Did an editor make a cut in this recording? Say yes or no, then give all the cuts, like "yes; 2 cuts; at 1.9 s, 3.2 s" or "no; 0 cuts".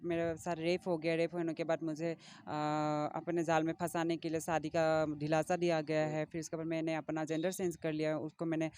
no; 0 cuts